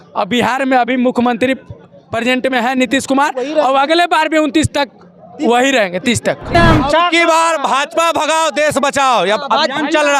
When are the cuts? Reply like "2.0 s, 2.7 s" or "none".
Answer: 6.5 s